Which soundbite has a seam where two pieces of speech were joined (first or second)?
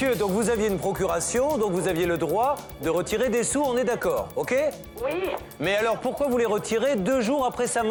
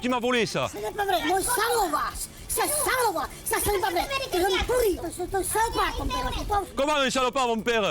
second